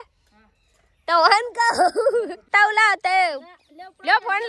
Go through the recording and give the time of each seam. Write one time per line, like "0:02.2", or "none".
0:02.5

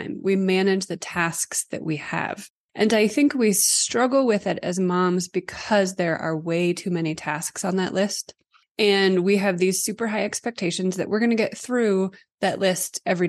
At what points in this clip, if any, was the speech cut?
0:12.2

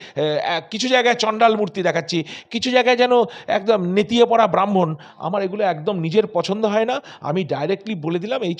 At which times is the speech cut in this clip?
none

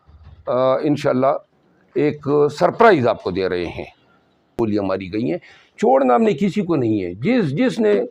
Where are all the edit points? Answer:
0:04.6

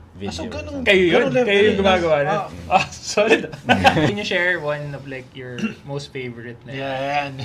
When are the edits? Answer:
0:04.1

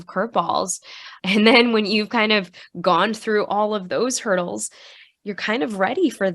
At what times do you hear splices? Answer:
0:01.1

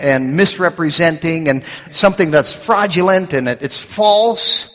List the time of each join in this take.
0:01.9

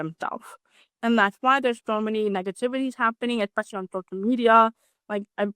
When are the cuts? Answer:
0:00.9

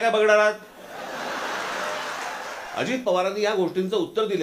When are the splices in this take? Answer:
0:02.6

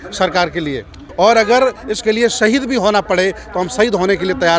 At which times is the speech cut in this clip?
0:01.0

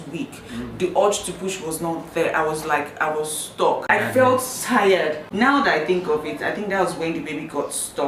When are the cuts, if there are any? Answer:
none

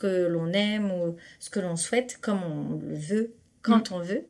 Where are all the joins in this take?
none

